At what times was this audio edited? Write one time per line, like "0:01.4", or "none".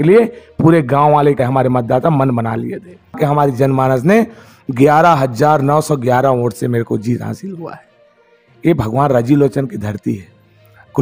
0:01.4
0:03.1